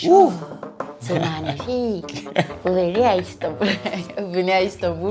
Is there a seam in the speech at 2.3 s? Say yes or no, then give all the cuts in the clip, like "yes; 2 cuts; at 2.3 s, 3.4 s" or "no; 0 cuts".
no; 0 cuts